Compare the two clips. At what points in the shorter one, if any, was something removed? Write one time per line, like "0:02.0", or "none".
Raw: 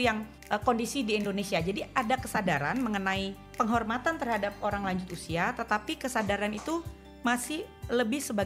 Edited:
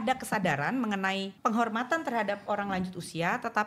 0:01.3